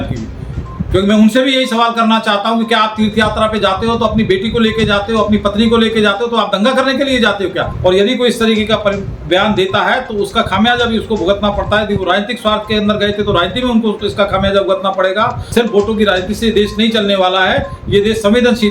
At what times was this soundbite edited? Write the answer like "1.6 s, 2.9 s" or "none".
7.7 s, 15.4 s